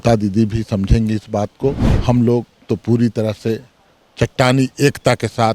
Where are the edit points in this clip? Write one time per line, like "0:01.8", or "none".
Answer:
0:01.9